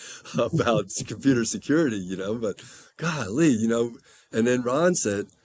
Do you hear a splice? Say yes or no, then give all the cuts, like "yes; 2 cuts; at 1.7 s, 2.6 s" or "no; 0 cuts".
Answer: no; 0 cuts